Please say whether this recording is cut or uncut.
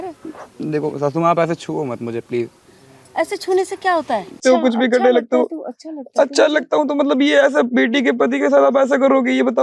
cut